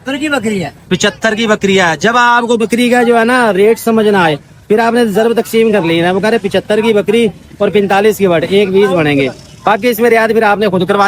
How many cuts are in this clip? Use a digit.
0